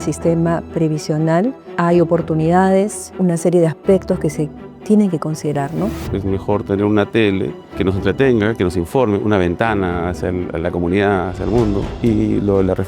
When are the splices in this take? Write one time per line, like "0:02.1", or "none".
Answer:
0:01.7
0:03.0
0:06.0
0:07.6
0:11.9